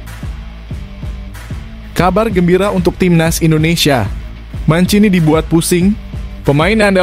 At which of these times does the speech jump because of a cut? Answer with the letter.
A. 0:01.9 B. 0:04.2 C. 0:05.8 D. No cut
A